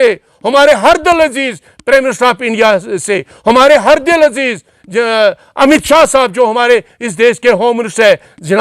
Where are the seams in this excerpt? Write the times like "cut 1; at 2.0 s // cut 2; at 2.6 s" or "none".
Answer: none

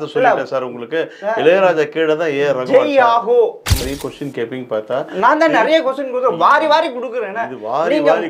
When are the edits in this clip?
cut 1; at 3.8 s

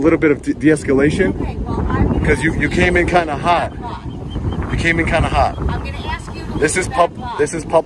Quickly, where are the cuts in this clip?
none

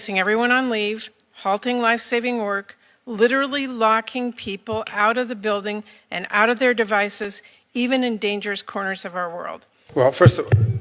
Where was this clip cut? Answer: cut 1; at 9.7 s

